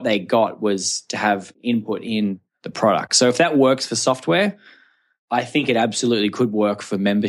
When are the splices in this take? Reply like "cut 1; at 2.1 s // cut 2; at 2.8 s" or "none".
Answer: cut 1; at 1.5 s